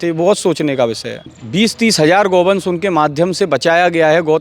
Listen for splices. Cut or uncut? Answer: cut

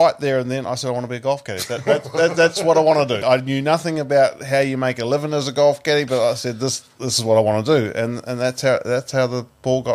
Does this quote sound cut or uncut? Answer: cut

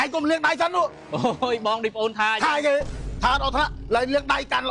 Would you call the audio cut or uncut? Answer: uncut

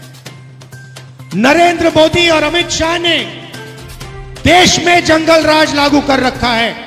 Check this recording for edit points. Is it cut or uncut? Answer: cut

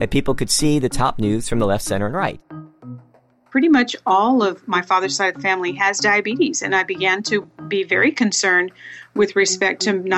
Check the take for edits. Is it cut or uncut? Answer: cut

